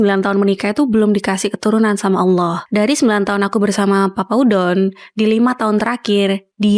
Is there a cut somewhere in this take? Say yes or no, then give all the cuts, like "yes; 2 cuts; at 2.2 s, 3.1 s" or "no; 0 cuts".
yes; 1 cut; at 2.6 s